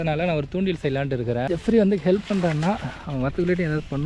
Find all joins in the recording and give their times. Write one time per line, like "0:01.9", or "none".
0:01.5